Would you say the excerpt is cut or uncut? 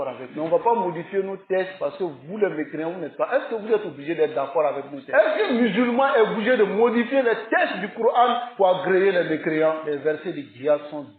cut